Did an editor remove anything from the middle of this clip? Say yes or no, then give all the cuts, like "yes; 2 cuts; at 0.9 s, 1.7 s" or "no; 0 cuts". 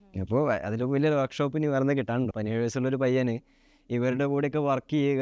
yes; 1 cut; at 2.3 s